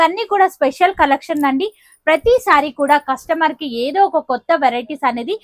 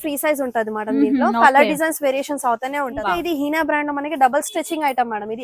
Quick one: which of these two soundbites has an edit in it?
second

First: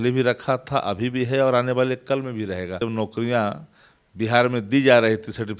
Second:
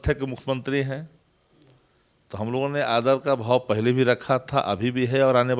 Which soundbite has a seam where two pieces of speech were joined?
first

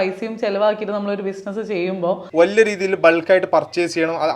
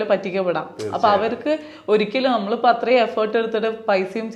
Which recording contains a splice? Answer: first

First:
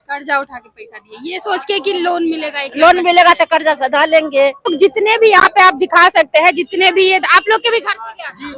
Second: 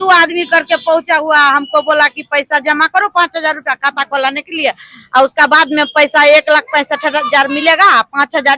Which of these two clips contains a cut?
first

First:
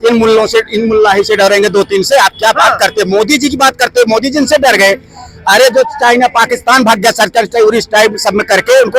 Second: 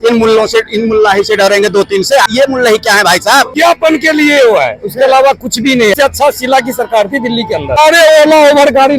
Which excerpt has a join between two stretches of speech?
second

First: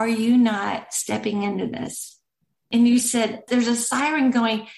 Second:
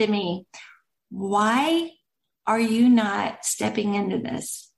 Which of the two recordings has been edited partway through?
first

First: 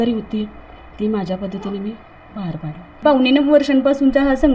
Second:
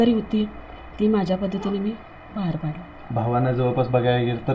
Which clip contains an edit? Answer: first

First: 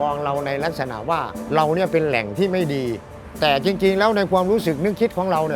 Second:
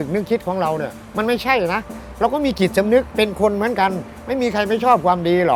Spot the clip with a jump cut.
first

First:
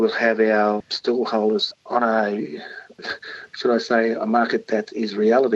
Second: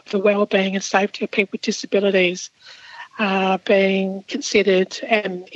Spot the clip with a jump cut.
first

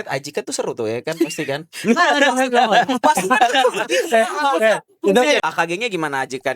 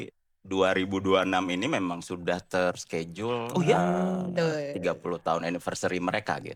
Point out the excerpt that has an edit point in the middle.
first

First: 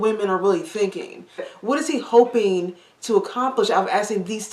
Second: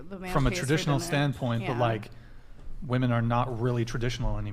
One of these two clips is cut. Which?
first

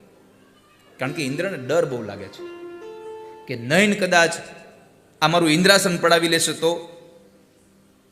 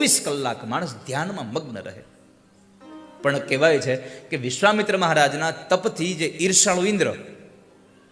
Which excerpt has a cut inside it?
second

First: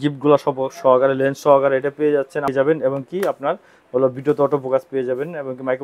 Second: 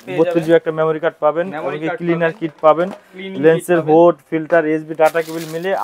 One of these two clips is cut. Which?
first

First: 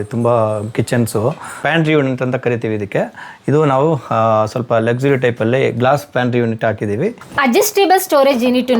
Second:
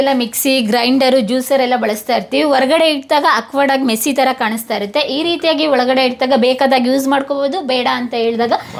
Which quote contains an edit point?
first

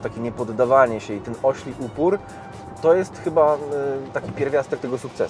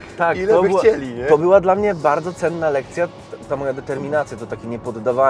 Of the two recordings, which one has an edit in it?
second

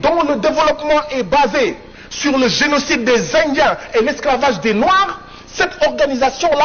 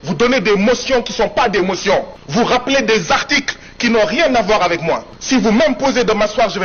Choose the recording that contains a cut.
second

